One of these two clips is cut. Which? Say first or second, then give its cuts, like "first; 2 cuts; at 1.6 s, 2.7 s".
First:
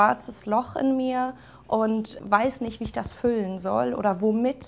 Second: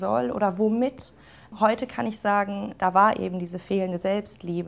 first; 1 cut; at 2.1 s